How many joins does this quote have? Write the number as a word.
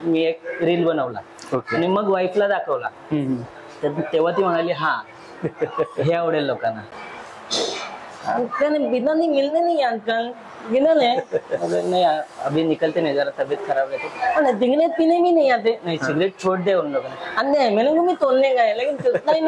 one